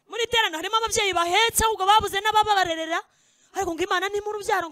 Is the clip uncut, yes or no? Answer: yes